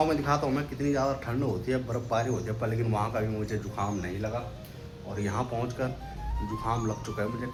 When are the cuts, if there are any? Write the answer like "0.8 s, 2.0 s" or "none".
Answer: none